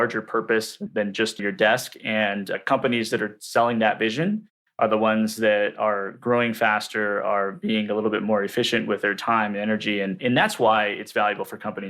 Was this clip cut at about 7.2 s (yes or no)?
no